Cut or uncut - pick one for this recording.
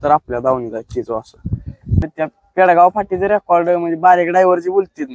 cut